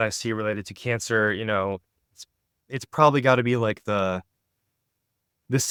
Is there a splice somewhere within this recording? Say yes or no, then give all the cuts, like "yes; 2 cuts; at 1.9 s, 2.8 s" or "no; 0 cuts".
no; 0 cuts